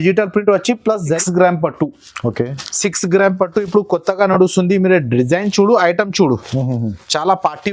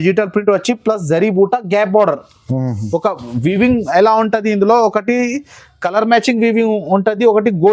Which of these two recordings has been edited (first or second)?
first